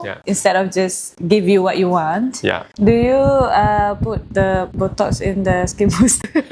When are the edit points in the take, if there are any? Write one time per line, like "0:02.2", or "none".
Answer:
0:02.6